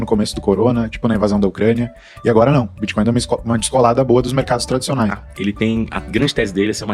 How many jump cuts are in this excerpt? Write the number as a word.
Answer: one